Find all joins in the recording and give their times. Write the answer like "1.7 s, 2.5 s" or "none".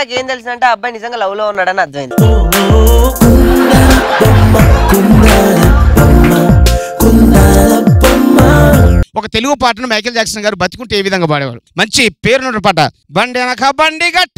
9.0 s